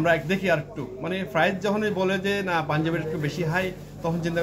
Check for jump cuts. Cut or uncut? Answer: uncut